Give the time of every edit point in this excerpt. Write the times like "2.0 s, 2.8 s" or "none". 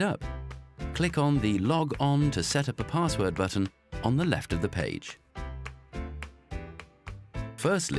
none